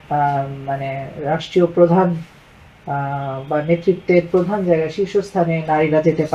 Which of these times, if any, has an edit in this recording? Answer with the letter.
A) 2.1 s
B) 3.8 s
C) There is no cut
C